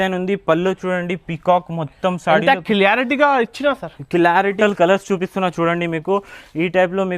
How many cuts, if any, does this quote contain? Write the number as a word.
one